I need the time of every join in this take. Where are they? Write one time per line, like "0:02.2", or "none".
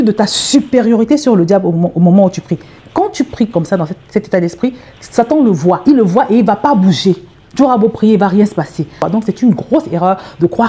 0:05.8
0:08.9